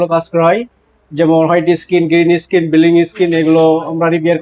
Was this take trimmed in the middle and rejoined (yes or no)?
no